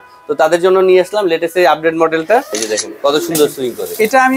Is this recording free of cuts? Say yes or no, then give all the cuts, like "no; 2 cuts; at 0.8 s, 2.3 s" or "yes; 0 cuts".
no; 1 cut; at 2.6 s